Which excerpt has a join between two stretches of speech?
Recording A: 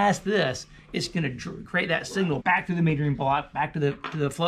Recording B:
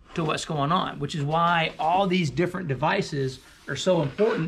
A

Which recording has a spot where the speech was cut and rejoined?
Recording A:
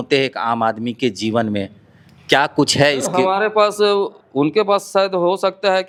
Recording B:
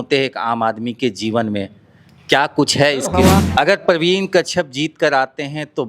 B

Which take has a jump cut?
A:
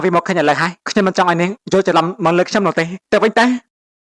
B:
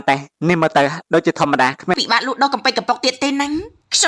B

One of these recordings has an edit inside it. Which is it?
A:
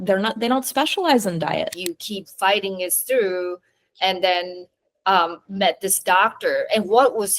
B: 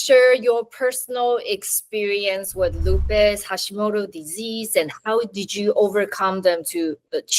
A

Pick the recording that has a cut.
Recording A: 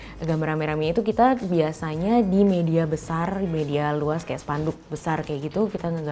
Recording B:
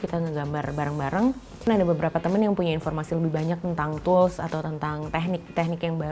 B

